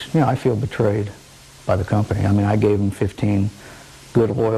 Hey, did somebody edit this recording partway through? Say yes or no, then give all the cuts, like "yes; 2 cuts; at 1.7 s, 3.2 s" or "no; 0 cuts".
yes; 1 cut; at 2.3 s